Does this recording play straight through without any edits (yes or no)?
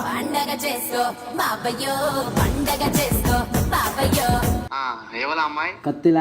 no